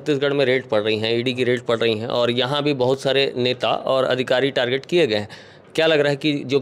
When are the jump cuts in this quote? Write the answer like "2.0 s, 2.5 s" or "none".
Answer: none